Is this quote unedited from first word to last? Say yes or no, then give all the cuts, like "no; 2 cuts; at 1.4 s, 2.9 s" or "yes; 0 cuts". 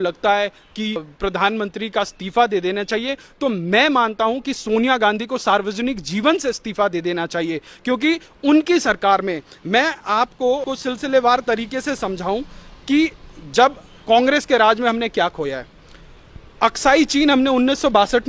no; 2 cuts; at 1.1 s, 10.7 s